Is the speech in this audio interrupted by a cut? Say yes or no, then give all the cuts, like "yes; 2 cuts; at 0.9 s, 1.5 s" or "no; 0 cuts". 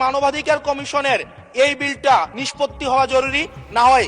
yes; 1 cut; at 2.4 s